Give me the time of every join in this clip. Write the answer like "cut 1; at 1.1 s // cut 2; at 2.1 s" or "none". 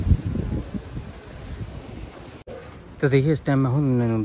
none